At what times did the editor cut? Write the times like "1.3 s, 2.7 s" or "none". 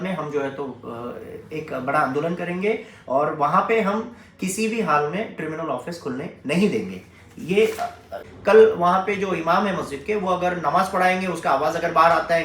8.3 s